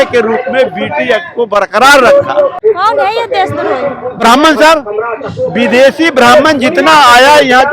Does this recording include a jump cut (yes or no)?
yes